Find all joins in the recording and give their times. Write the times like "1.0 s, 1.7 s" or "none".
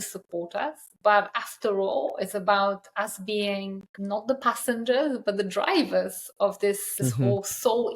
3.9 s, 6.9 s